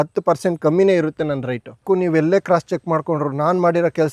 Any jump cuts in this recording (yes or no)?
yes